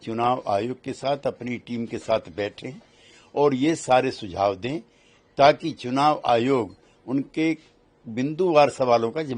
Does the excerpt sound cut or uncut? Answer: uncut